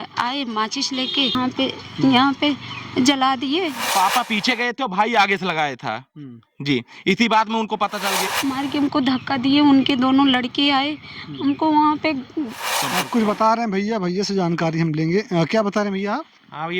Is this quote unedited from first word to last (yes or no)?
no